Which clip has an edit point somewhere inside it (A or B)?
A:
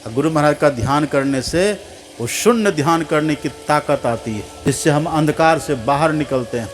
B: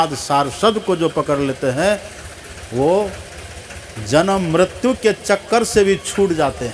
A